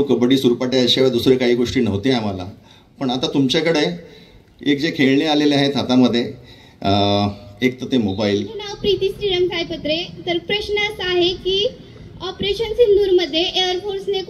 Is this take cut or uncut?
cut